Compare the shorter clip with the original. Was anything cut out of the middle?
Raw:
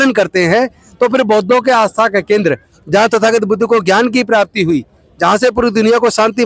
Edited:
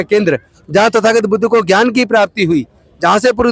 no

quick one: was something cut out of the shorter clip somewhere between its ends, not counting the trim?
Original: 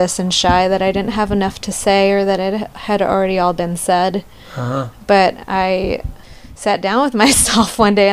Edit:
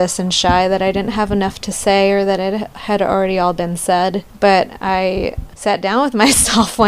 yes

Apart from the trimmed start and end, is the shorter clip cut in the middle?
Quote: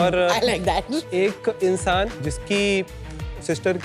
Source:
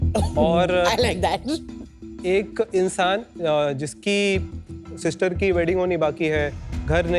yes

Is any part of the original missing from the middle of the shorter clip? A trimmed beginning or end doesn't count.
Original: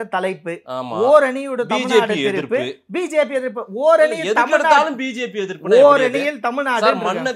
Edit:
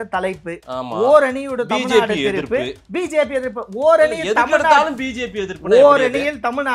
no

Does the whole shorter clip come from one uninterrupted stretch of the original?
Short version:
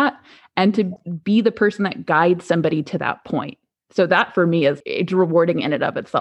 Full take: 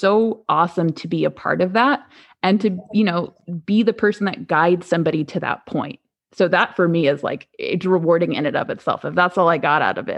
no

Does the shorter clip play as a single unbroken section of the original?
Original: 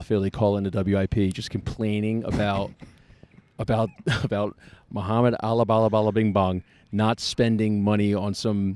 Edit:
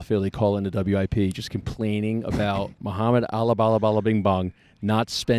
no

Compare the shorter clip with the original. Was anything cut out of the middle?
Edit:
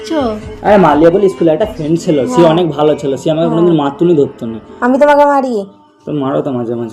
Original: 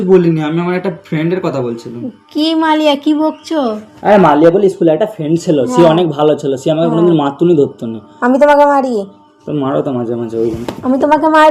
no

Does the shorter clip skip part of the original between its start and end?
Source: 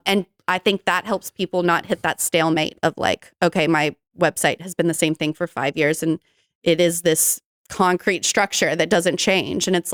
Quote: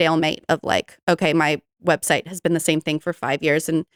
no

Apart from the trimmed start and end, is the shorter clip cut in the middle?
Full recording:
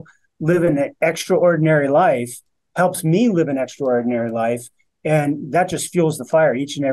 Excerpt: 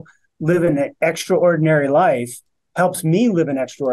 no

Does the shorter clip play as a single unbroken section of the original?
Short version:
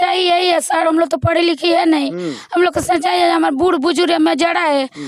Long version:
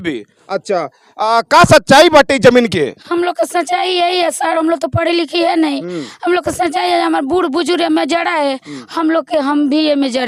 yes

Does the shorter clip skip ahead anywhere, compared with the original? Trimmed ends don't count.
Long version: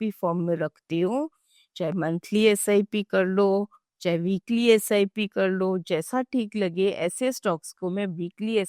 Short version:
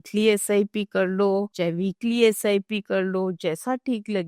yes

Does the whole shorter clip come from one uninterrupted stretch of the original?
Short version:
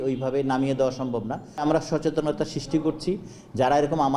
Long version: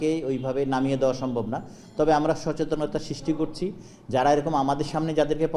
no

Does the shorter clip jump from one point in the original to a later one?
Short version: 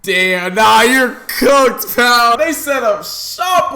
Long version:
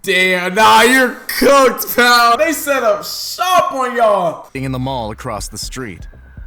no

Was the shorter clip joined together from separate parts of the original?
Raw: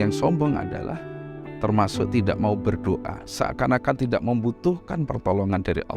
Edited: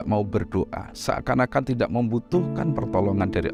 no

